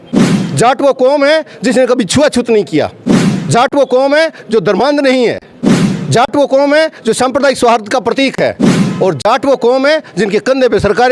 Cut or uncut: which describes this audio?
uncut